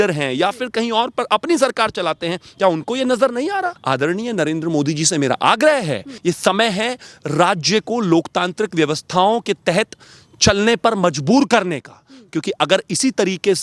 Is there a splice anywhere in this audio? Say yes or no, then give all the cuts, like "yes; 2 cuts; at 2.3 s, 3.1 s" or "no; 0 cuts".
yes; 2 cuts; at 3.8 s, 6.1 s